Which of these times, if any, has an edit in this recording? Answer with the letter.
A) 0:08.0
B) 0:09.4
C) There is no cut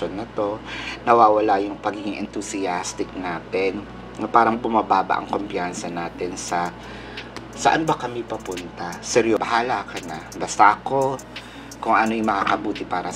B